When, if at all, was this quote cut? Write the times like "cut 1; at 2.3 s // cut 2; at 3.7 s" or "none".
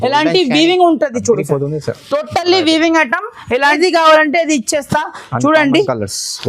cut 1; at 3.8 s